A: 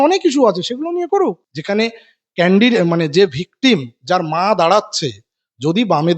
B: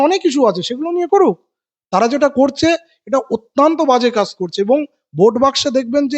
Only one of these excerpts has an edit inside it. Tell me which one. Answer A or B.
A